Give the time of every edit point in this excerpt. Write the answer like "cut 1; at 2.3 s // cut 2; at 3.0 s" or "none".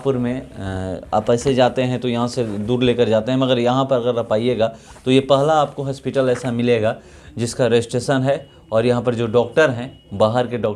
none